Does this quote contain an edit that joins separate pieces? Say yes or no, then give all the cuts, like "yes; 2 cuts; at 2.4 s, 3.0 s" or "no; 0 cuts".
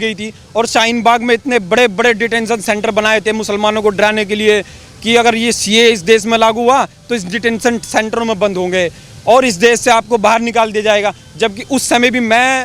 no; 0 cuts